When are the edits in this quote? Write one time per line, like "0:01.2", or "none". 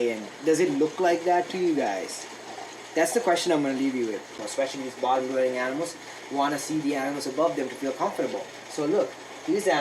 0:04.4